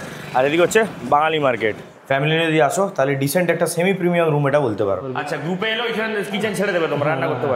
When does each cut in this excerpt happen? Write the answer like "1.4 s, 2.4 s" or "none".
1.9 s, 5.1 s